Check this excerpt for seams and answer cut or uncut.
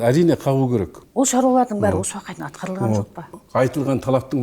cut